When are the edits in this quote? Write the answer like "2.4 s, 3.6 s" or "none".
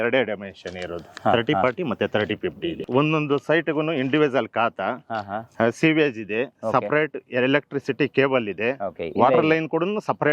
2.6 s